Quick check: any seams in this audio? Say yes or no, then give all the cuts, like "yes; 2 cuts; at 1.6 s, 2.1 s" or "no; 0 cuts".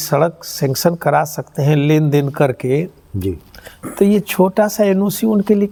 no; 0 cuts